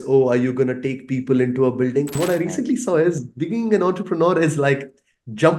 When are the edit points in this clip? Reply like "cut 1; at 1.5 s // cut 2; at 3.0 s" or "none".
cut 1; at 2.1 s